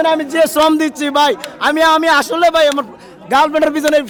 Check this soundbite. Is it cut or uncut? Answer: uncut